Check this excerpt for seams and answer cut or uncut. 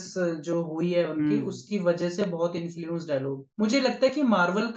cut